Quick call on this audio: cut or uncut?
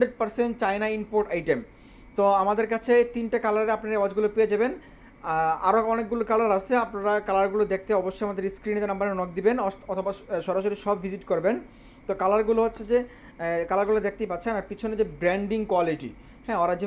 uncut